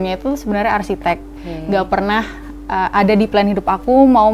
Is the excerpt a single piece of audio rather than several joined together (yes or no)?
no